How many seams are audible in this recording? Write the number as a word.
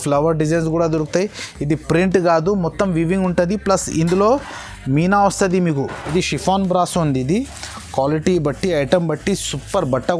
two